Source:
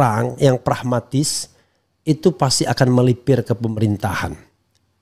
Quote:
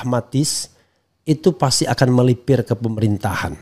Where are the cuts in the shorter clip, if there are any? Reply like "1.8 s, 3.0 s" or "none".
none